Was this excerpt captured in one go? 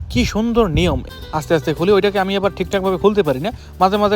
no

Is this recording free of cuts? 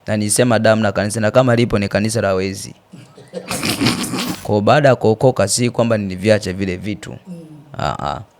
no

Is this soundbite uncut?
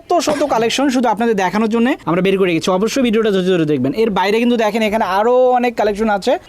yes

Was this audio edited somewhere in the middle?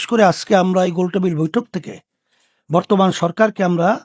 no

